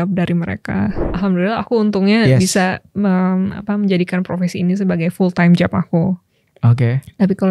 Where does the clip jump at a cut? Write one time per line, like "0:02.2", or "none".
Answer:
0:01.0